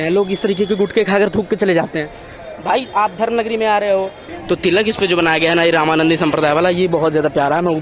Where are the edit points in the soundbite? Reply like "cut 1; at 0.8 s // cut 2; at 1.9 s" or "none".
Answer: cut 1; at 4.3 s

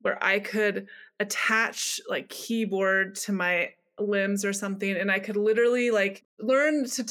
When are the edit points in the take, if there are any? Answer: cut 1; at 6.2 s

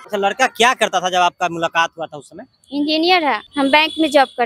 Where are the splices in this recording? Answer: cut 1; at 3.5 s

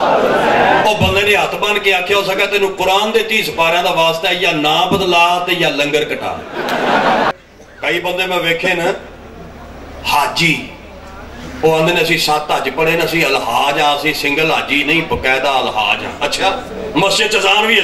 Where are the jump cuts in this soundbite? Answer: cut 1; at 7.3 s

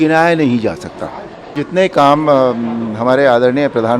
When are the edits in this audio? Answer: cut 1; at 1.6 s

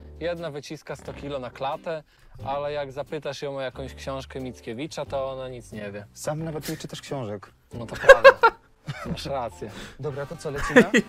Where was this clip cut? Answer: none

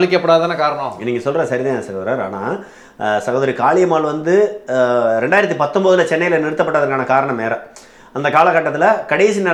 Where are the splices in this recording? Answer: none

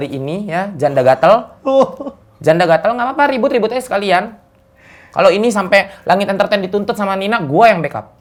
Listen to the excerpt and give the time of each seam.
none

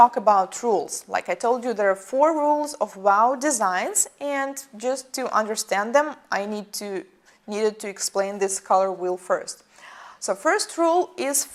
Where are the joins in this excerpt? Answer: none

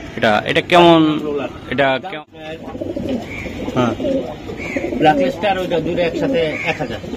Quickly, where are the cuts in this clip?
cut 1; at 2.5 s

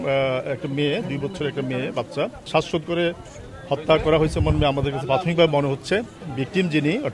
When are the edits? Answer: cut 1; at 2.5 s // cut 2; at 6.2 s

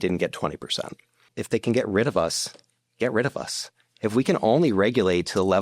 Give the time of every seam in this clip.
cut 1; at 1.3 s

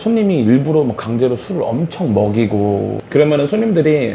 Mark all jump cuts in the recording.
cut 1; at 3.0 s

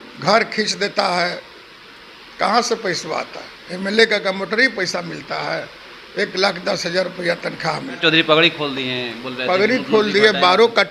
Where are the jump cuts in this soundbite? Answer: cut 1; at 8.0 s

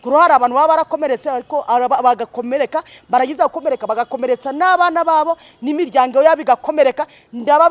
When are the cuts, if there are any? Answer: none

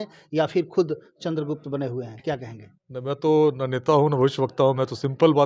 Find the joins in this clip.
none

